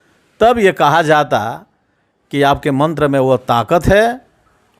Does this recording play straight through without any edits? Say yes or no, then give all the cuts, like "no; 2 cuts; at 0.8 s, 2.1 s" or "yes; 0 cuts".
yes; 0 cuts